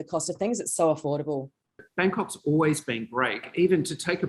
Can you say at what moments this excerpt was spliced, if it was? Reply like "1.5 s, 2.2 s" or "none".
1.8 s